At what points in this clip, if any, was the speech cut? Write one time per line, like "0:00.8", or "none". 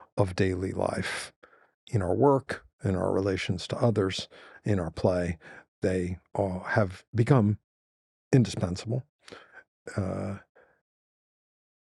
none